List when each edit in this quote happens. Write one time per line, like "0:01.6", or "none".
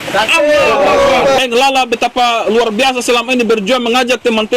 0:01.4